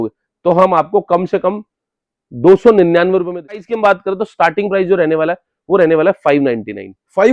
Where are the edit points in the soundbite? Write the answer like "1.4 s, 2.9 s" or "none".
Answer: 3.7 s